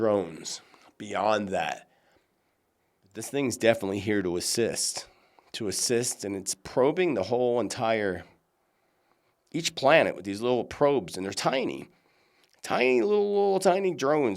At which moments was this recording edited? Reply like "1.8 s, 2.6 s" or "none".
3.3 s